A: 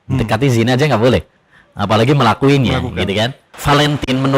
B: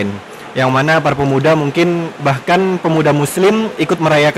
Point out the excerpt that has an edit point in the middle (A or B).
A